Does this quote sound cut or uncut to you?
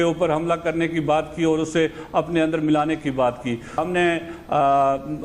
cut